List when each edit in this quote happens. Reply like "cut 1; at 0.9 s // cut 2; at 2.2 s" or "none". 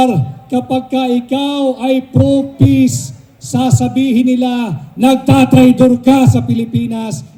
none